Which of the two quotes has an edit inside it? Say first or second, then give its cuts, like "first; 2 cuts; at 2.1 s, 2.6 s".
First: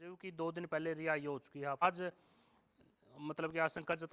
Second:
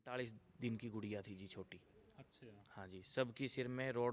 first; 1 cut; at 1.8 s